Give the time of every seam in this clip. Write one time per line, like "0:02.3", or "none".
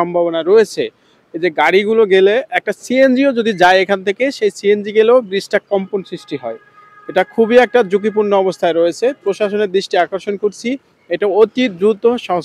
none